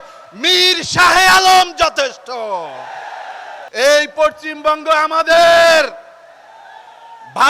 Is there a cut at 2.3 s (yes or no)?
no